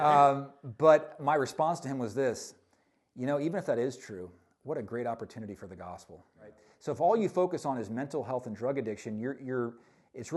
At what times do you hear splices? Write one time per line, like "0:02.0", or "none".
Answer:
0:06.7